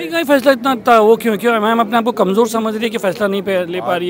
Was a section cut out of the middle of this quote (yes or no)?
no